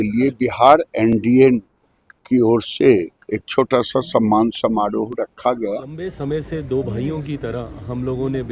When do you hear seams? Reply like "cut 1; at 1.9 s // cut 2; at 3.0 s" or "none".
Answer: cut 1; at 6.1 s